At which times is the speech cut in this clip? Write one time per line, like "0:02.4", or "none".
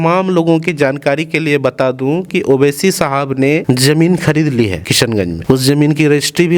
none

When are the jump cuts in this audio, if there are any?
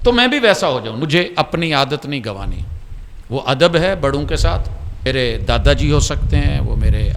0:01.0
0:05.0

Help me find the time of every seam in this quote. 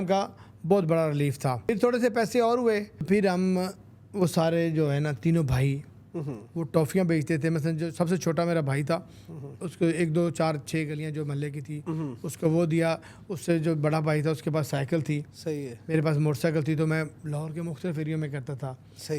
0:01.7
0:03.1

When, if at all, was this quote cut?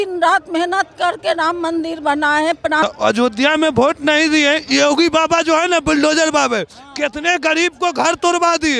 0:02.8

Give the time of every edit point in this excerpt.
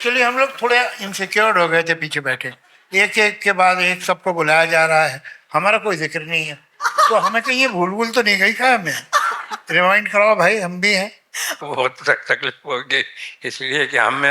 0:11.6

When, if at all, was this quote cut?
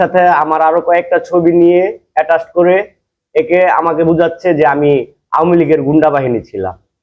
none

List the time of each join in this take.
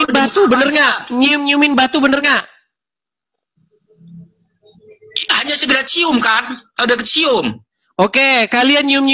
none

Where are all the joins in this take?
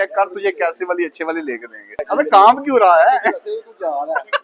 0:02.0

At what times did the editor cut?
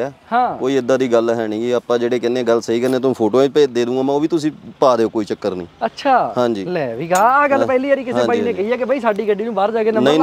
none

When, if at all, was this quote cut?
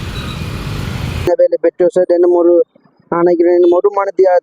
0:01.3

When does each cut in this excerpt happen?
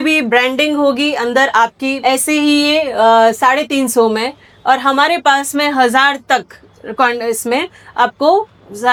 none

